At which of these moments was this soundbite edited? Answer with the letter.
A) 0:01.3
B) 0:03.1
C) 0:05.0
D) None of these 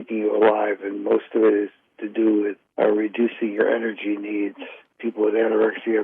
C